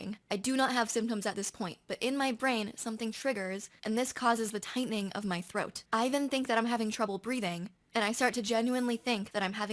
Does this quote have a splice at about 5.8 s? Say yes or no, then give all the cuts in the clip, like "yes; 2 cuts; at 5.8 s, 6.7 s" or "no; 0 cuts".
yes; 1 cut; at 5.8 s